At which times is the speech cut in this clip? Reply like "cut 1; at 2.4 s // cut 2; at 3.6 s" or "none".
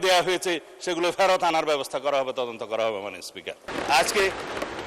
cut 1; at 3.7 s